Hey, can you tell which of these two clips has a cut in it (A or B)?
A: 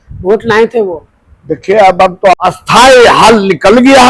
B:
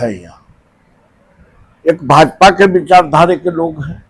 A